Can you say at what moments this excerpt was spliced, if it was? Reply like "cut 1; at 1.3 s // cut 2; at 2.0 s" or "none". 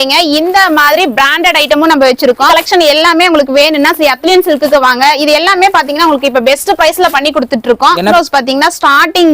cut 1; at 2.5 s // cut 2; at 8.1 s

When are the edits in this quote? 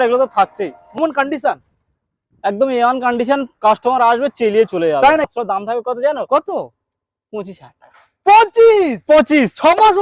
cut 1; at 1.0 s // cut 2; at 5.4 s

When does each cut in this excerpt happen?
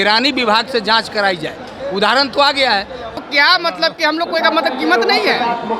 cut 1; at 3.2 s

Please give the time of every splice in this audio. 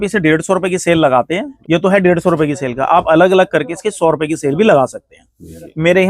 cut 1; at 1.5 s

